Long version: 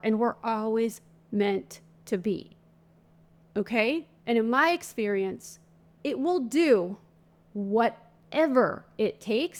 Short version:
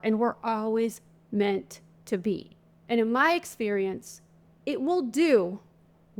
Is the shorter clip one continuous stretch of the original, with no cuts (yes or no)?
no